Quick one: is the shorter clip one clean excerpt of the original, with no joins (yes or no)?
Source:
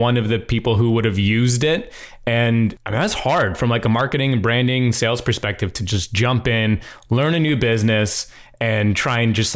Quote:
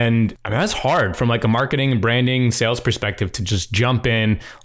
yes